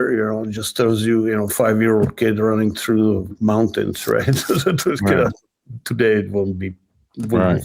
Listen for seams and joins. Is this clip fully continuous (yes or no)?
yes